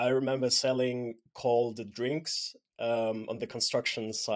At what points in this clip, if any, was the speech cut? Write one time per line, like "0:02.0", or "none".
none

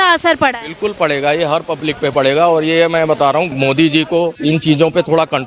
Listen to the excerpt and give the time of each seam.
0:03.5
0:04.4

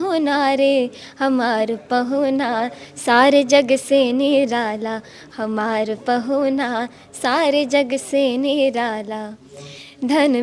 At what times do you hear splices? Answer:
none

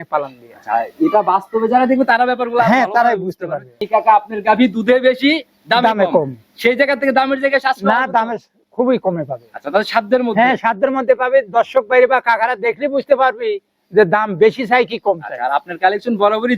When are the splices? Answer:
0:03.8

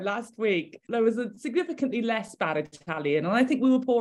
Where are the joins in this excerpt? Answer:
none

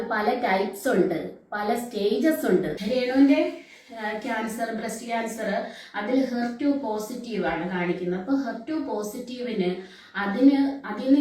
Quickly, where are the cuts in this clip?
0:02.4

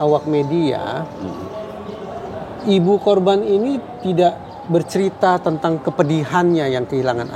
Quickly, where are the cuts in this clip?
none

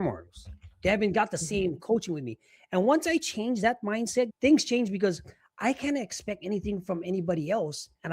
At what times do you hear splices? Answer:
0:04.3

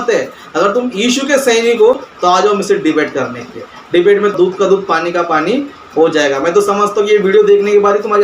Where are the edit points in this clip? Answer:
0:02.1
0:04.3

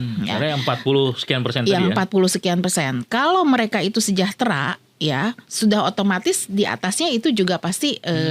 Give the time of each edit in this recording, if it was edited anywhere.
none

